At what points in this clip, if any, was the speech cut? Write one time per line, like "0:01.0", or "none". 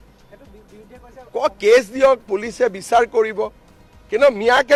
none